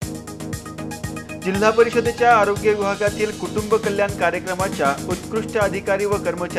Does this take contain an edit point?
no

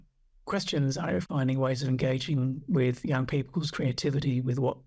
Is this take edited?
yes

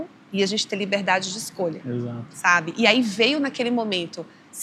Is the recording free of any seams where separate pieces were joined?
yes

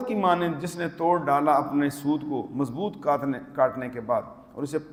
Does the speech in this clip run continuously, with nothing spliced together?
yes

